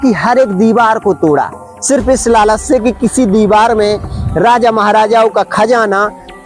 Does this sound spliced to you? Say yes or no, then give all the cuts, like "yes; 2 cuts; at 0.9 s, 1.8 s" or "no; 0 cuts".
no; 0 cuts